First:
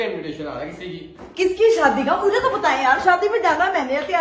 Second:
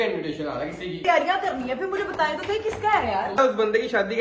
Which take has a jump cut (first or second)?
second